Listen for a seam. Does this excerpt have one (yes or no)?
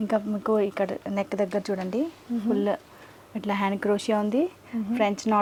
no